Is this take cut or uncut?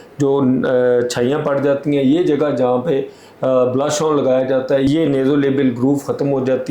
cut